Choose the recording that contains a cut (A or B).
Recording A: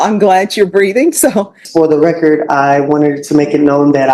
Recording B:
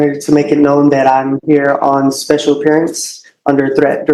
A